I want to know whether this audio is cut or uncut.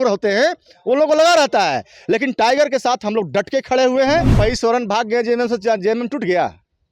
cut